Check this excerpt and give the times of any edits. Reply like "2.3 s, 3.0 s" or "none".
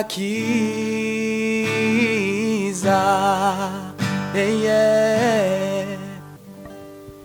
6.2 s